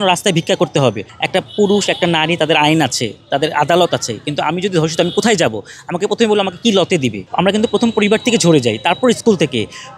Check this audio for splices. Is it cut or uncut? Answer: cut